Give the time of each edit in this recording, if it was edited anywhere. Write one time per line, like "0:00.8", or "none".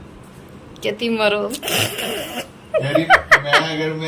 none